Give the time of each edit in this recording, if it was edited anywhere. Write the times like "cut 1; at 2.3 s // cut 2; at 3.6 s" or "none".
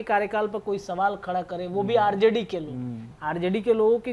none